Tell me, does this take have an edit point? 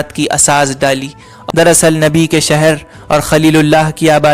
yes; 1 cut; at 1.3 s

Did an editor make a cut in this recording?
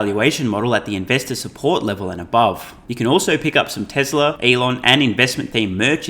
yes; 2 cuts; at 2.8 s, 4.4 s

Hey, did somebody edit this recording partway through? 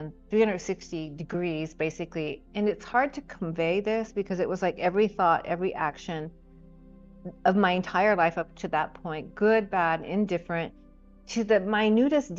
yes; 1 cut; at 2.4 s

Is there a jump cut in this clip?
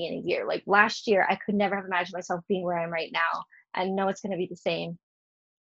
no; 0 cuts

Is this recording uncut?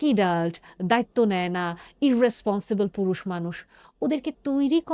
yes; 0 cuts

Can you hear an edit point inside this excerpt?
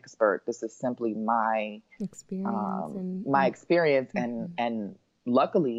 no; 0 cuts

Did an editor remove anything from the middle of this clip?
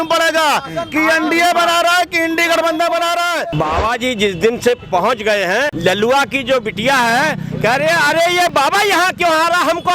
yes; 3 cuts; at 3.5 s, 5.7 s, 8.5 s

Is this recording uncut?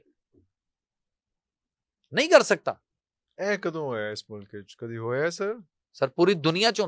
yes; 0 cuts

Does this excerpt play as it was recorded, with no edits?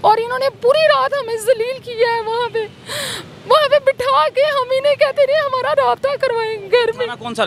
yes; 0 cuts

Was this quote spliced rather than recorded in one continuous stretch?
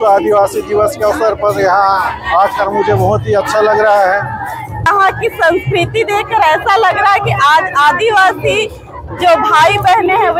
yes; 1 cut; at 4.9 s

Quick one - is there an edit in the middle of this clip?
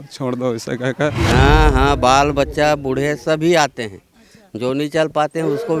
yes; 1 cut; at 1.2 s

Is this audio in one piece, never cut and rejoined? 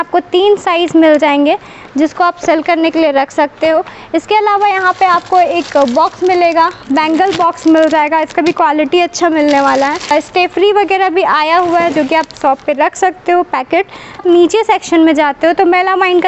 yes; 0 cuts

